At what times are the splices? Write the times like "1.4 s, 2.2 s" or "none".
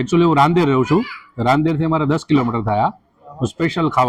none

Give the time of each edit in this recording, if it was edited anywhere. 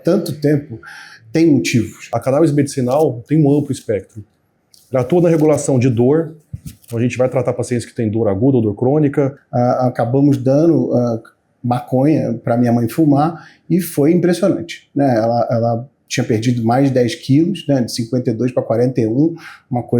2.1 s, 9.4 s

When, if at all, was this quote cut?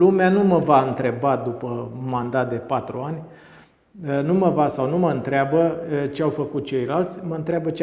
none

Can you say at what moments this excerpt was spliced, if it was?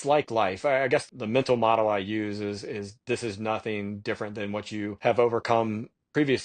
1.1 s, 5.0 s

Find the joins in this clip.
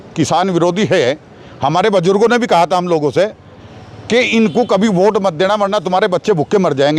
none

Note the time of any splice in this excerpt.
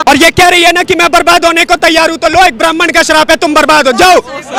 none

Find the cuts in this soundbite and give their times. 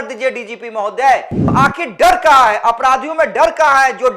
1.4 s

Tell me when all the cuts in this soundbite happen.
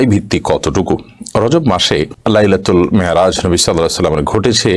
none

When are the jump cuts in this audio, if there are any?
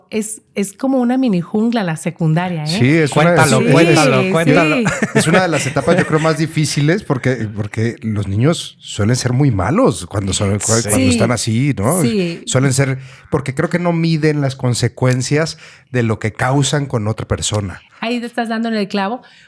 none

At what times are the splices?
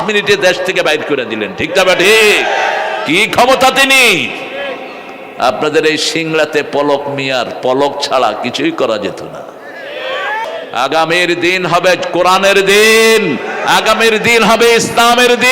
10.4 s

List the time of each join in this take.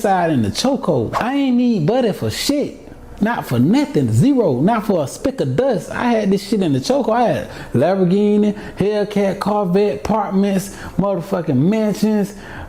1.2 s

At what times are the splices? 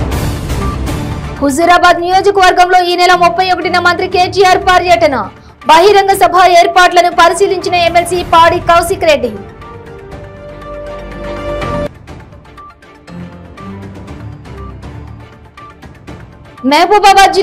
1.2 s

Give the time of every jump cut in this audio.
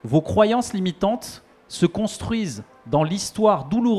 none

